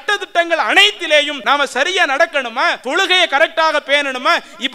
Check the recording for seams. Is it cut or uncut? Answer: cut